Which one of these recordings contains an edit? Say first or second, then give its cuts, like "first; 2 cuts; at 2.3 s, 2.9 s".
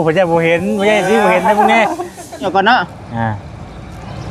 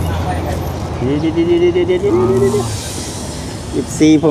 first; 1 cut; at 2.5 s